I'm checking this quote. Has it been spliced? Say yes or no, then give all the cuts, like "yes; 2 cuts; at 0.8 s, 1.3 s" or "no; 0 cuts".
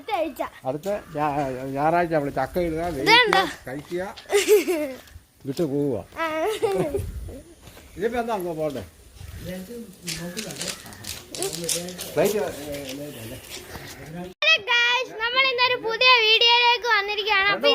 yes; 1 cut; at 14.3 s